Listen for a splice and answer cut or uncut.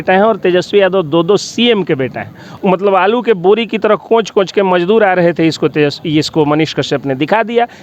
cut